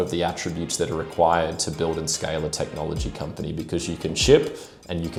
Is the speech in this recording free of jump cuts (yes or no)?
yes